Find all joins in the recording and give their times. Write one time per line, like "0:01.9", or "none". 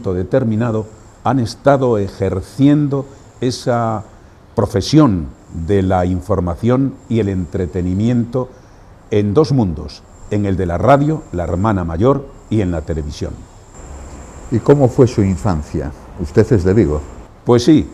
none